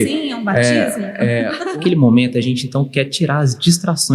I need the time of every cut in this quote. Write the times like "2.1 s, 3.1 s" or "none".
1.7 s